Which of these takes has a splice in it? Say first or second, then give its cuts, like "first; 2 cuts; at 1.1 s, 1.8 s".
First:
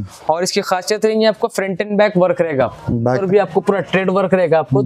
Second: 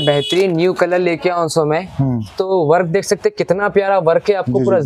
first; 1 cut; at 3.2 s